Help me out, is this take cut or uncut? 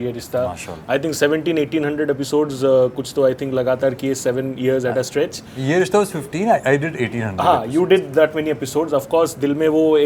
uncut